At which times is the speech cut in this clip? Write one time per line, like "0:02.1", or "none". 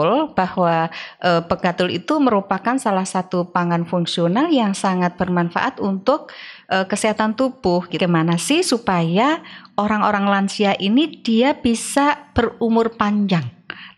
0:08.0